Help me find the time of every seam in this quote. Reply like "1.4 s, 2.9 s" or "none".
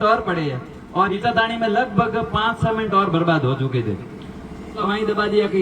1.1 s, 4.8 s

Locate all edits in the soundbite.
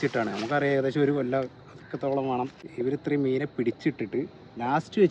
2.6 s

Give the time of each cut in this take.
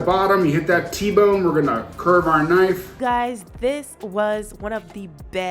2.9 s

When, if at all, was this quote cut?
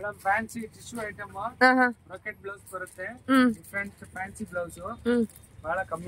none

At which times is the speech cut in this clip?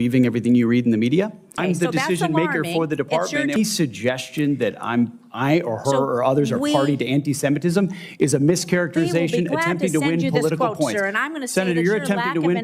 1.6 s, 3.6 s

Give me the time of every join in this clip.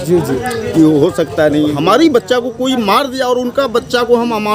1.7 s

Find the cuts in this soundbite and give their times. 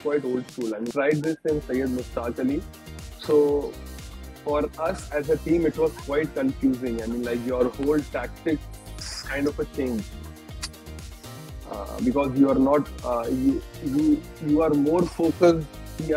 0.9 s

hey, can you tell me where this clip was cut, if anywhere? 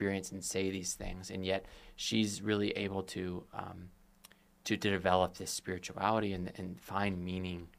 none

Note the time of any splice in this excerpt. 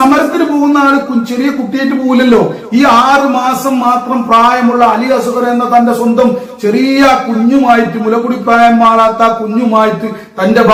none

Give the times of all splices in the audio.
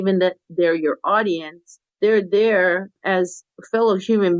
none

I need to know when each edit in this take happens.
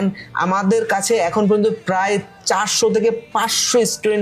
none

